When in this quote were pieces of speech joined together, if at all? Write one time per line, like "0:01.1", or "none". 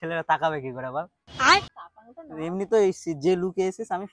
0:01.2
0:01.8